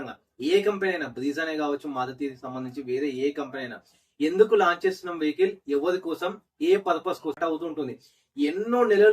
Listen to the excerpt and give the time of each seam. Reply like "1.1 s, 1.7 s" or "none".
7.4 s